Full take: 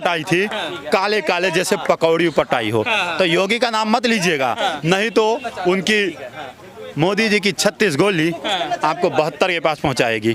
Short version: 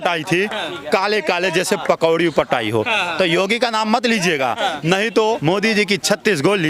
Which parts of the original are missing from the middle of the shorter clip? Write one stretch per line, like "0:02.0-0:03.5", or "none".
0:05.4-0:06.9